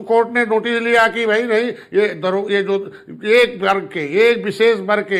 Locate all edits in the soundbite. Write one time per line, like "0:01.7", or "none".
none